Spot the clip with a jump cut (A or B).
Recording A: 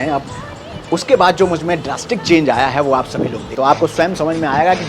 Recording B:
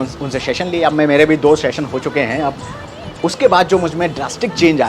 A